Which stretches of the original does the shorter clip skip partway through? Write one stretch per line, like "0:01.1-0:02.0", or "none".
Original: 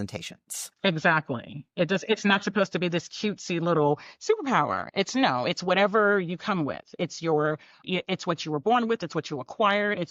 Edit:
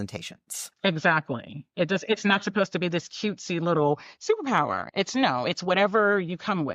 none